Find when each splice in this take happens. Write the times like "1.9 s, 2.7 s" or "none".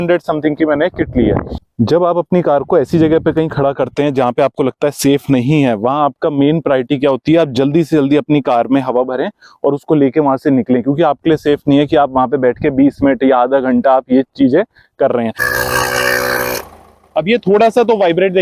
1.5 s, 15.4 s